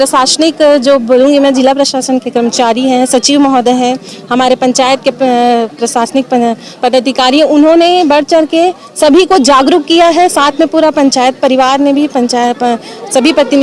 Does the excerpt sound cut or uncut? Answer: uncut